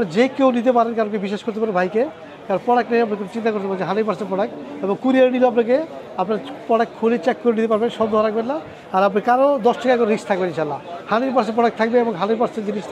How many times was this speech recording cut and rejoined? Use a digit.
0